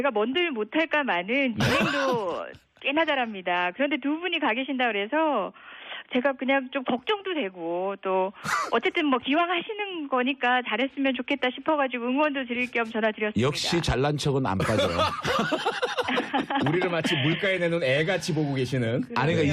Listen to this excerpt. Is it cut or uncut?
cut